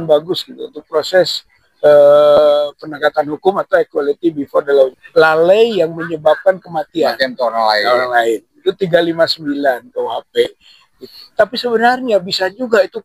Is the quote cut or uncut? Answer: cut